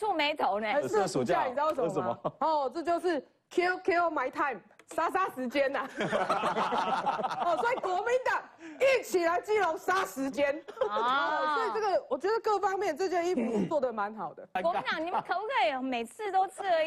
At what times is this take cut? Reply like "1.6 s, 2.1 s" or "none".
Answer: 14.5 s